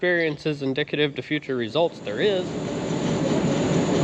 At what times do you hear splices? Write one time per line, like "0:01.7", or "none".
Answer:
0:02.6